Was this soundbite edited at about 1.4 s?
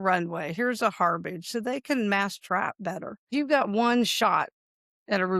no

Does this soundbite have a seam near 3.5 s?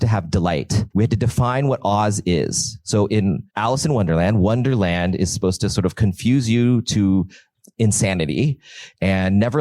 yes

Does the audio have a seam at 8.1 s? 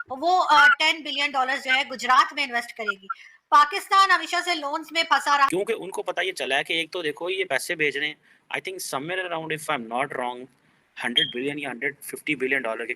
no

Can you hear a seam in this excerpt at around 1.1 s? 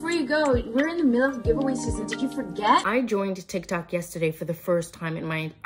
no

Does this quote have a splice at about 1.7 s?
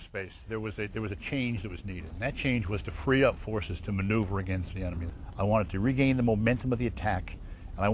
no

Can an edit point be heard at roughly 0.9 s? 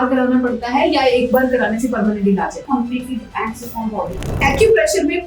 no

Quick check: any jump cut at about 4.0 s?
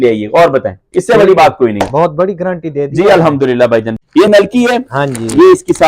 yes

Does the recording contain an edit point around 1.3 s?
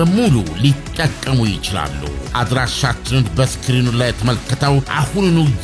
no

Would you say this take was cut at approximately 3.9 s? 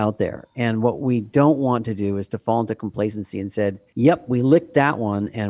no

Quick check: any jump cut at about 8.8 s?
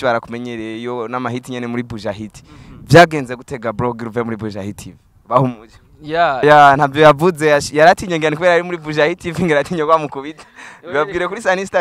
no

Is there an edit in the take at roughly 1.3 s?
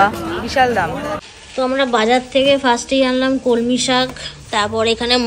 yes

